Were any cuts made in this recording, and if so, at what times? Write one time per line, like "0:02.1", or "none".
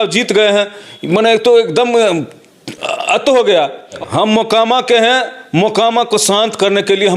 0:04.0